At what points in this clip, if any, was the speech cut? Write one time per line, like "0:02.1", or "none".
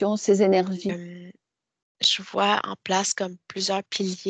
0:00.9